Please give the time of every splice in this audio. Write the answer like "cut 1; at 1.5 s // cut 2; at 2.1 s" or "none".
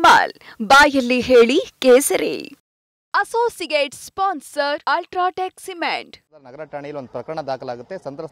cut 1; at 6.1 s